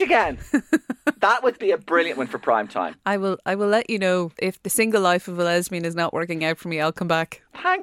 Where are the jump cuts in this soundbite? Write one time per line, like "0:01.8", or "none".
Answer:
0:04.3